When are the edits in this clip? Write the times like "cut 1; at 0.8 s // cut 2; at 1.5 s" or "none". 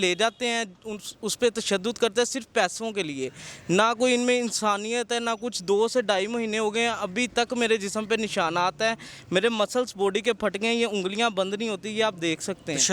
none